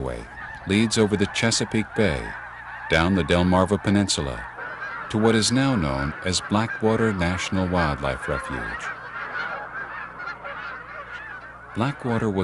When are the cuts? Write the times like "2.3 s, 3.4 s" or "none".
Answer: 3.7 s